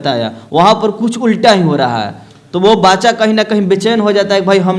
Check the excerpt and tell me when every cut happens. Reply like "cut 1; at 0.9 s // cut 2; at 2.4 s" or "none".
none